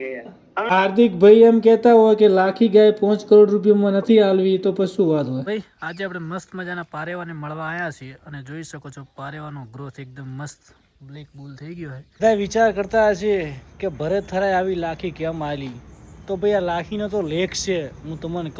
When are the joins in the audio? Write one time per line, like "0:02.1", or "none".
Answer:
0:05.4
0:12.2